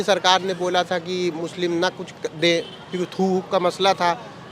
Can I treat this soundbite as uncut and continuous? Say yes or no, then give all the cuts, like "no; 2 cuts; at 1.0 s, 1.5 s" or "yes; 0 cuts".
yes; 0 cuts